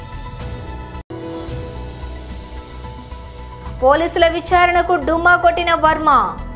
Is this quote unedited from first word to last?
no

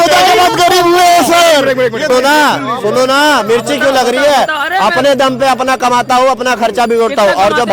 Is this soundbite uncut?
no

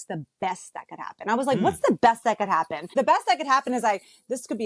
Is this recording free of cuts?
no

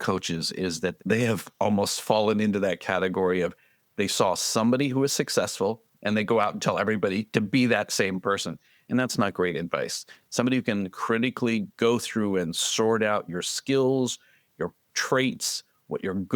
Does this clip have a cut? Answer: yes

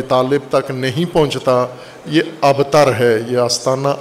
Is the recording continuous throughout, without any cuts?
yes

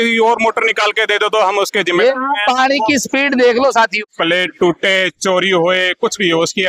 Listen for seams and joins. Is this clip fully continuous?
no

